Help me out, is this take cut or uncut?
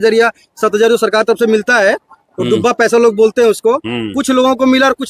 uncut